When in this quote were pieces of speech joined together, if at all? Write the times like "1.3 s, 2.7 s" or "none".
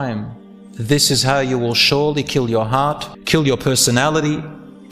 3.1 s